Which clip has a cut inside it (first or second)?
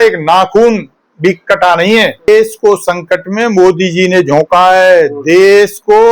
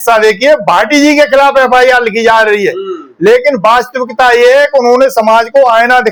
first